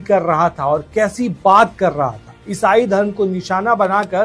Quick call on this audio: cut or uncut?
uncut